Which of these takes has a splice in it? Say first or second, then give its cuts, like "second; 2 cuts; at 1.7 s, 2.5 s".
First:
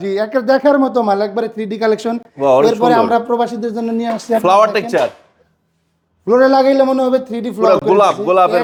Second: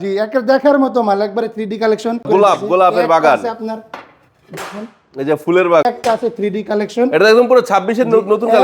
second; 2 cuts; at 2.3 s, 5.8 s